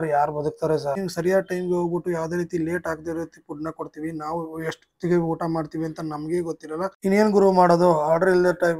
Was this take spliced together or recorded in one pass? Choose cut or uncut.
cut